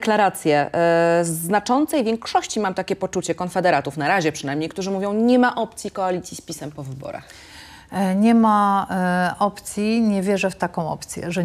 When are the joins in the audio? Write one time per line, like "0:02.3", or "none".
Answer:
none